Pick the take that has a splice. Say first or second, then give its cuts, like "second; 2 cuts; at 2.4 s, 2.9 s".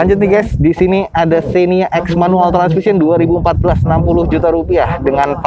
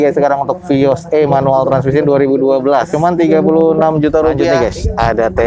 second; 2 cuts; at 2.9 s, 4.5 s